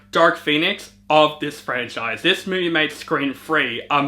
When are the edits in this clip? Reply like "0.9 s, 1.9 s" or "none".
2.2 s

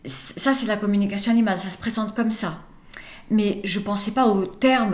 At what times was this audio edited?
none

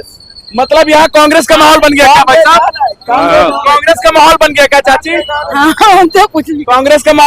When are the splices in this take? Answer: none

